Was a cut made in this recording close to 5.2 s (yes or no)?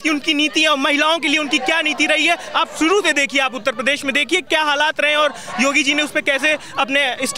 no